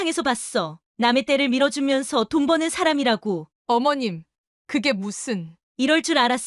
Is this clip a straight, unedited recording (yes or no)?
no